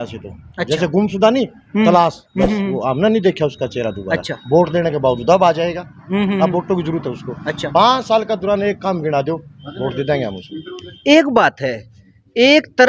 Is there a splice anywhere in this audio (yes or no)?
no